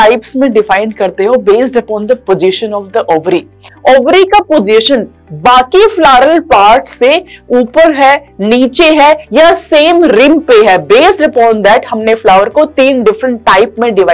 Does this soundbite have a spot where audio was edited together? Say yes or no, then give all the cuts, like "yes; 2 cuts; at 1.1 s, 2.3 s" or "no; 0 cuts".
yes; 1 cut; at 3.7 s